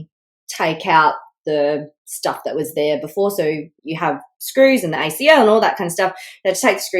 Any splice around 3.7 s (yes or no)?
yes